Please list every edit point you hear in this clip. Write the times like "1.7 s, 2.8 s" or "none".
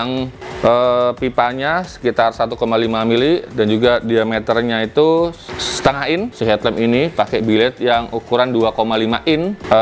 6.3 s